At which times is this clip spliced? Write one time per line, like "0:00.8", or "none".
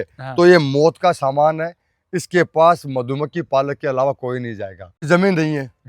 0:04.8

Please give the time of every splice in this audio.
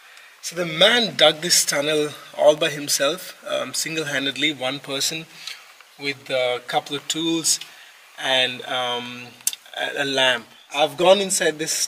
0:10.6

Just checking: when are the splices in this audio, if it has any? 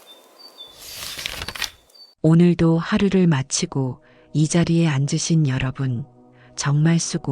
0:01.0
0:02.1

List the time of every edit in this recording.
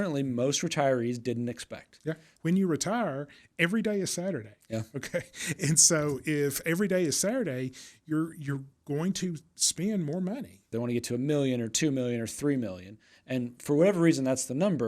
0:02.3
0:10.6

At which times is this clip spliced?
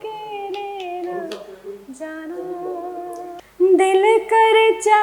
0:03.3

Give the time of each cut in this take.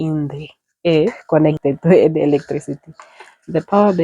0:01.2

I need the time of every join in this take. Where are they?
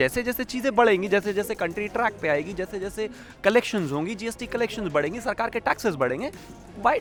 none

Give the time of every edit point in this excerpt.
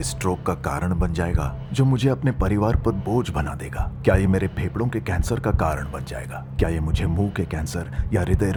none

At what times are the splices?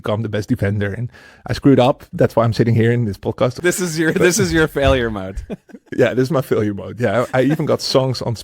0:03.6

